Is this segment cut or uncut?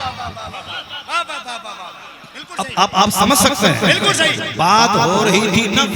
uncut